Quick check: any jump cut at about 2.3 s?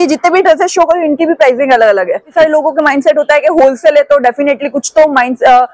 yes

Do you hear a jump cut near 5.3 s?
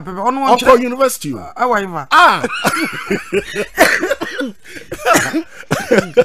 no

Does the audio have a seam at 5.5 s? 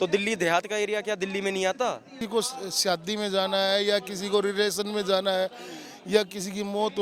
no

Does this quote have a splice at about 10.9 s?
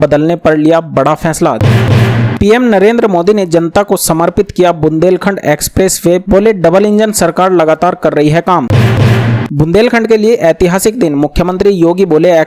no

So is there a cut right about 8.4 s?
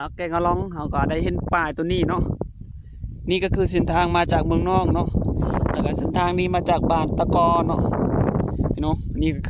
no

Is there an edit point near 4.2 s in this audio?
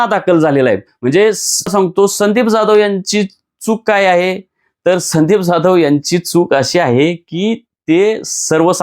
no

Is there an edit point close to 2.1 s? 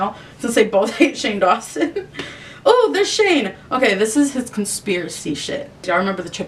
no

